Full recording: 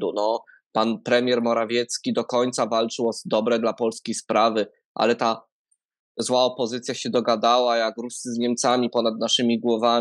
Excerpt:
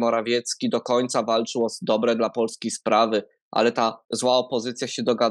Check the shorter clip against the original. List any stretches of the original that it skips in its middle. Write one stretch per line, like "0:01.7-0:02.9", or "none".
0:05.5-0:06.1